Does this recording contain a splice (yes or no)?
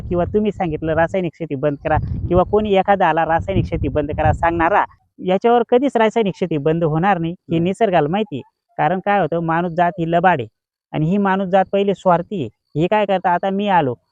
no